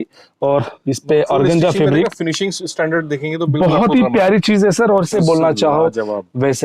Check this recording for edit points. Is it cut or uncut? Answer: cut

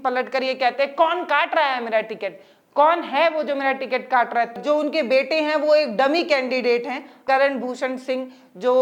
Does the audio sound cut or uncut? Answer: cut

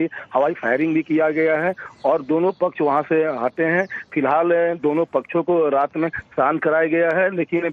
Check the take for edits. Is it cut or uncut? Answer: uncut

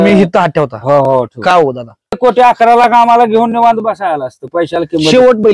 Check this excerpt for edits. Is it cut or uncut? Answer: cut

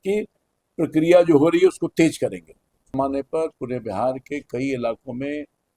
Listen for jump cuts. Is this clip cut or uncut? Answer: cut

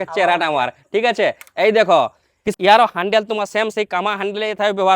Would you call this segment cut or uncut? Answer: cut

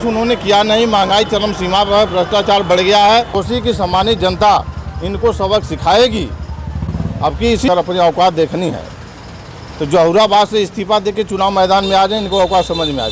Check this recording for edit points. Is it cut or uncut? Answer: cut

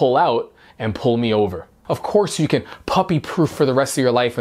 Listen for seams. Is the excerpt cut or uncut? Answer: cut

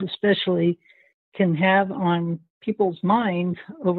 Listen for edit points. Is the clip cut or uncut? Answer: uncut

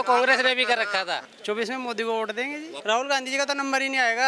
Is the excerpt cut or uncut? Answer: cut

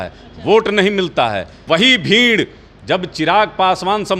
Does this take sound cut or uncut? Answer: cut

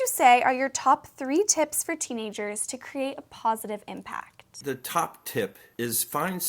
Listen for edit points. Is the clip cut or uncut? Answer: cut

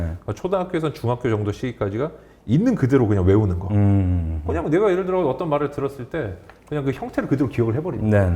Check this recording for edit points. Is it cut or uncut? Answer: uncut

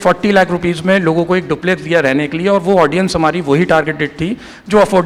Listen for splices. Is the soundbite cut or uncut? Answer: uncut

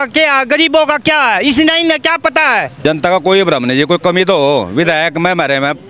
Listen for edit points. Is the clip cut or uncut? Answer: cut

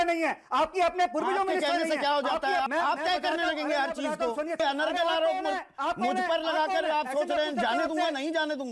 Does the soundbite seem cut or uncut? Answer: cut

